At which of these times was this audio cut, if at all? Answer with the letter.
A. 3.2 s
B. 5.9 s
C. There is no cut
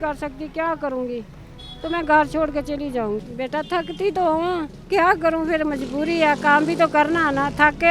A